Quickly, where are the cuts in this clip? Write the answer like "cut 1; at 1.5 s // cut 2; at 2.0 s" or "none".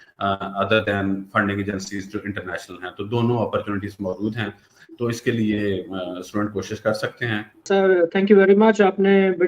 cut 1; at 7.7 s